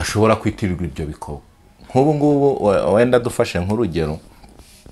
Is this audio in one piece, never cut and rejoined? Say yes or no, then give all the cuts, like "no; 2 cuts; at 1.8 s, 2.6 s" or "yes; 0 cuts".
yes; 0 cuts